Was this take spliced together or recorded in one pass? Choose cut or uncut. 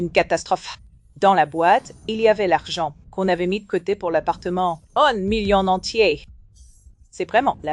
uncut